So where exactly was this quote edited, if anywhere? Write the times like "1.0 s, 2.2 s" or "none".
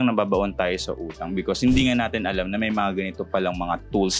none